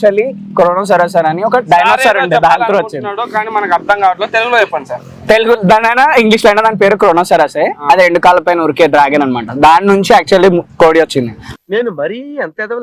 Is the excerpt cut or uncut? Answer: uncut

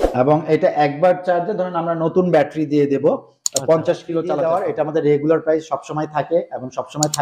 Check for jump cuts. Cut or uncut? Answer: cut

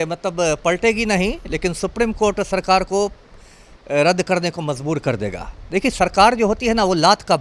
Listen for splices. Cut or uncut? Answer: uncut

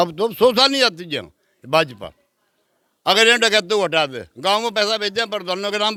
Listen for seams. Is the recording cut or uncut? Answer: uncut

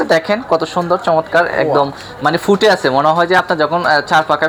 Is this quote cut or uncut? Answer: uncut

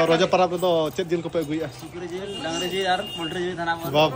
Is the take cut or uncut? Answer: uncut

